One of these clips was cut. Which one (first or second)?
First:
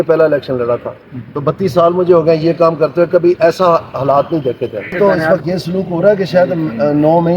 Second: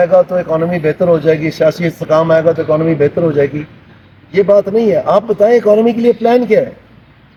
first